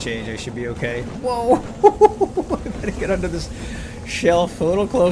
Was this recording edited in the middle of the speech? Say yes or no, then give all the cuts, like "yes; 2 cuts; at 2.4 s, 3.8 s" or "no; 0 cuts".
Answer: no; 0 cuts